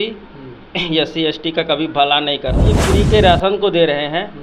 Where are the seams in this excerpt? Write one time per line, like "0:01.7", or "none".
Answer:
0:02.8